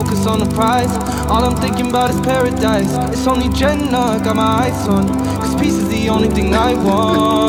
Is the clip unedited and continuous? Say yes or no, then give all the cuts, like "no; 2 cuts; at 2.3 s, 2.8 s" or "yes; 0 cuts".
yes; 0 cuts